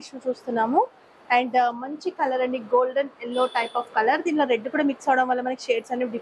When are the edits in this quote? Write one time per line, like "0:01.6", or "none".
none